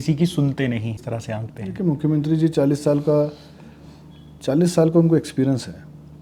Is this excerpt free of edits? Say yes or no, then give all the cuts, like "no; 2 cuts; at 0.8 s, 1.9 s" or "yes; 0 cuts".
yes; 0 cuts